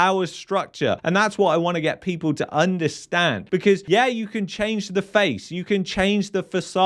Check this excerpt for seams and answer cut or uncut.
cut